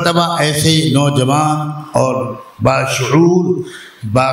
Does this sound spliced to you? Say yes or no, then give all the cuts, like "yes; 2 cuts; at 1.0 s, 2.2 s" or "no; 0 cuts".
no; 0 cuts